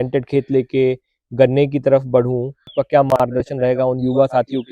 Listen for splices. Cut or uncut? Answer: cut